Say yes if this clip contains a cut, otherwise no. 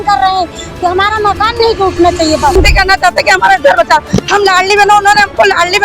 yes